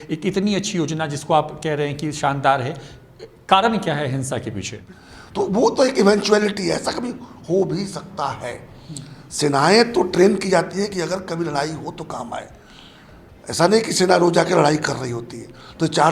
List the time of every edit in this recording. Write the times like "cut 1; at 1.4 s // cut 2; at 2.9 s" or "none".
cut 1; at 4.8 s

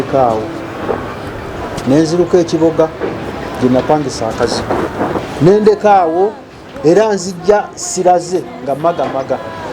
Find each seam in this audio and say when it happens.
cut 1; at 5.2 s

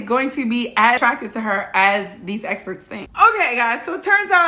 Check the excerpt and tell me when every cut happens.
cut 1; at 1.0 s // cut 2; at 3.0 s

